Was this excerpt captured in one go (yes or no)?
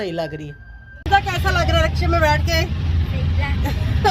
no